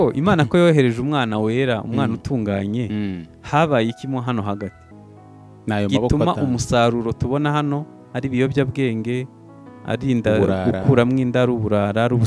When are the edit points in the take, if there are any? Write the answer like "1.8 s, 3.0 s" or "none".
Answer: none